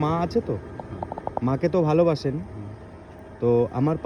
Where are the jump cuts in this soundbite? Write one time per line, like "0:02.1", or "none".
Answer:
none